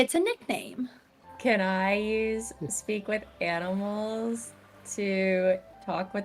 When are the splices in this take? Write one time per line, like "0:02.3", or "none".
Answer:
0:01.2